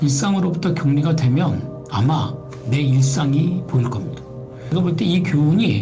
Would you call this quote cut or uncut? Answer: cut